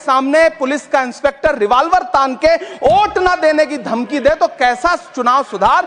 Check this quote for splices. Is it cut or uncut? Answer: uncut